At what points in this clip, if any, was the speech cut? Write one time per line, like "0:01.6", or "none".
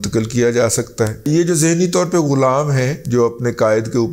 0:01.3